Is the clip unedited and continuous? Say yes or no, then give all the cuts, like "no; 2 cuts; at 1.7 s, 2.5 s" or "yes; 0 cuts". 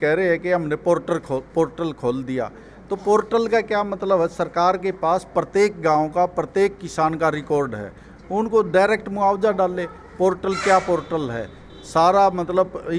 yes; 0 cuts